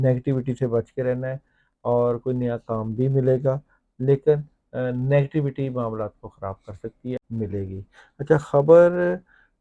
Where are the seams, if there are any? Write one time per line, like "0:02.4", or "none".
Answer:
0:07.2